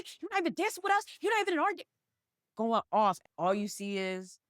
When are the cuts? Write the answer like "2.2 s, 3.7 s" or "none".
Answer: 3.3 s